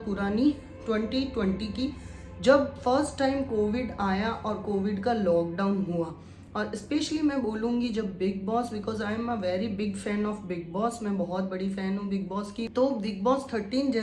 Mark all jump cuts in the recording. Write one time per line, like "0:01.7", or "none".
0:12.7